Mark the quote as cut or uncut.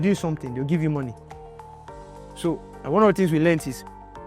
uncut